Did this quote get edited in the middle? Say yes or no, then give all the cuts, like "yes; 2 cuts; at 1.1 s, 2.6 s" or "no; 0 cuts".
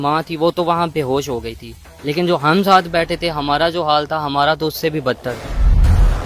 no; 0 cuts